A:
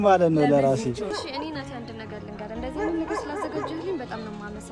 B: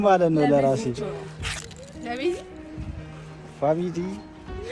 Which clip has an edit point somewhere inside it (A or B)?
A